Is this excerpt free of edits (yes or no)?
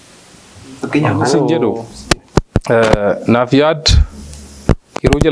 no